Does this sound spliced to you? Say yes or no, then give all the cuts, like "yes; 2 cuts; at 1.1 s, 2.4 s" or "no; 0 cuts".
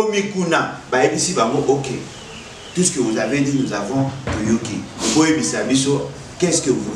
no; 0 cuts